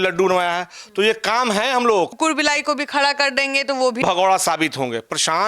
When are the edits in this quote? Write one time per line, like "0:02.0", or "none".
0:02.1
0:04.0